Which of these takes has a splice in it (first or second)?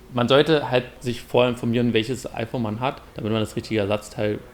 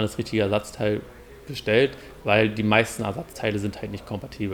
first